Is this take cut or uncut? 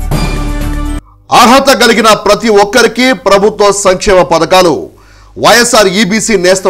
cut